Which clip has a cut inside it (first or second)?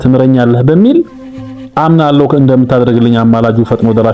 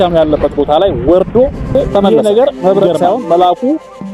second